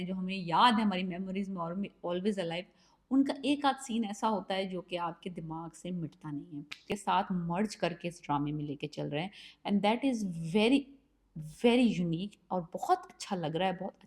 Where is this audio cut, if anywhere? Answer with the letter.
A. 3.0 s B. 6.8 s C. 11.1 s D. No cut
B